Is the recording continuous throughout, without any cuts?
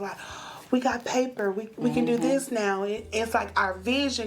yes; 0 cuts

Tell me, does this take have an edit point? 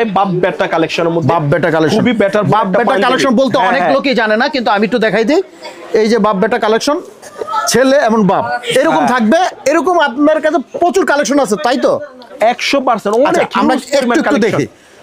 no; 0 cuts

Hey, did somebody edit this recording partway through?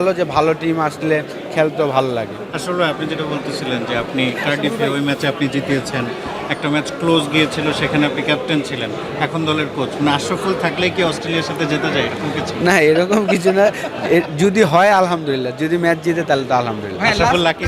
no; 0 cuts

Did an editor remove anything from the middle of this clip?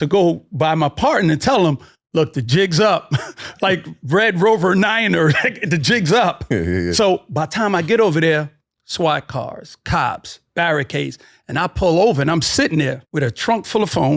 yes; 1 cut; at 13.0 s

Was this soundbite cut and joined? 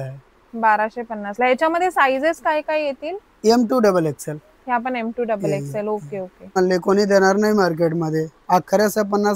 yes; 1 cut; at 6.6 s

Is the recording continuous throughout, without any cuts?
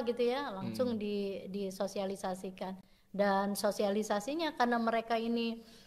yes; 0 cuts

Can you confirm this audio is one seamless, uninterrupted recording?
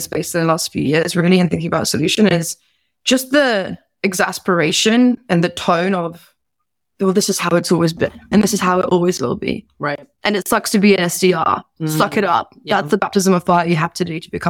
no; 1 cut; at 8.3 s

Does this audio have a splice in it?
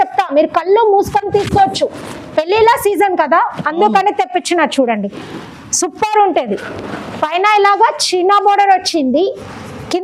no; 0 cuts

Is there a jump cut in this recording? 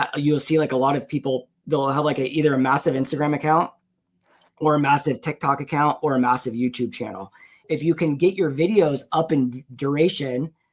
yes; 1 cut; at 7.6 s

